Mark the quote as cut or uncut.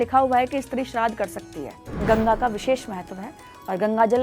cut